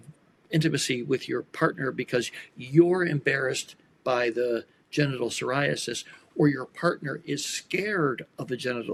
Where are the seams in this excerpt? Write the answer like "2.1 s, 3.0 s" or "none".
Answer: none